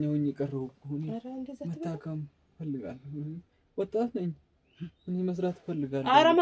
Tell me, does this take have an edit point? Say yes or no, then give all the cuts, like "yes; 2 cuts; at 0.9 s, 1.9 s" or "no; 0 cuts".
no; 0 cuts